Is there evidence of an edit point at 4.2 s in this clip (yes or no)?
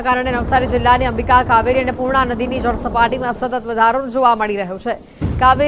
yes